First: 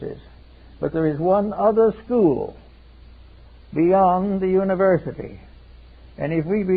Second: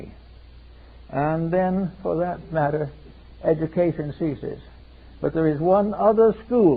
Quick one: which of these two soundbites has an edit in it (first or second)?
first